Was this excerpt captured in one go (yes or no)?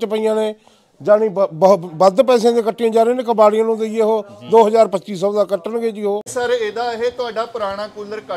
no